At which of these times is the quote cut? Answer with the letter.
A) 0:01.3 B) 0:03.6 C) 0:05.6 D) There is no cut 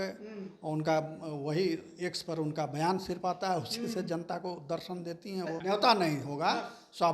C